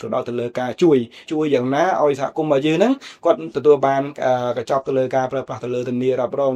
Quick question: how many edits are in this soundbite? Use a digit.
1